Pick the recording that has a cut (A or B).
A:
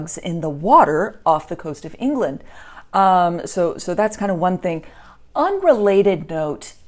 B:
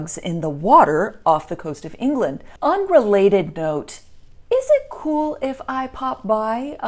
B